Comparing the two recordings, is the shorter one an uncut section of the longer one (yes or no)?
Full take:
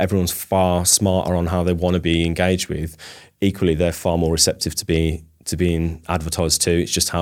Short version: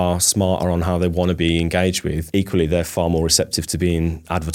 no